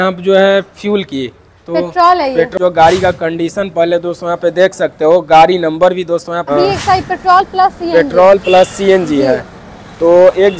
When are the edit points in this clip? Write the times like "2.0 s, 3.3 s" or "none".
2.5 s, 6.5 s

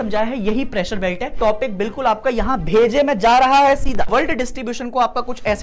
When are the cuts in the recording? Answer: 1.3 s, 4.1 s

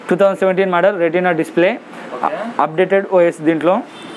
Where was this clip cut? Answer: none

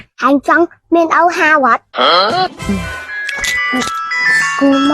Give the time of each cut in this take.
2.7 s

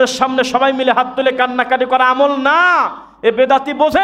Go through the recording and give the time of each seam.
none

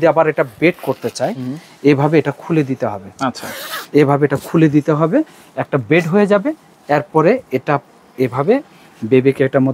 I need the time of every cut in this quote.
none

